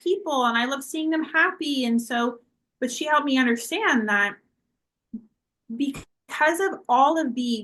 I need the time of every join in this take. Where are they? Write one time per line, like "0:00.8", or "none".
none